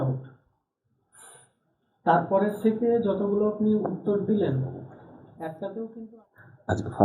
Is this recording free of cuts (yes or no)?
no